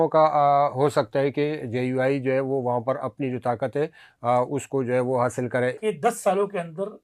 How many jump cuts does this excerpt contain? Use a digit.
1